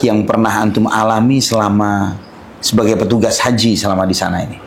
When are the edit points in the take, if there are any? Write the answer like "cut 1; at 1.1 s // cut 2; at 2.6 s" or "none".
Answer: none